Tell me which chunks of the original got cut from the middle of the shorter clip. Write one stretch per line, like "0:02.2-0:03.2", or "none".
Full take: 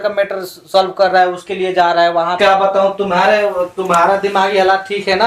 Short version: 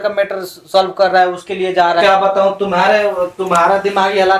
0:02.0-0:02.4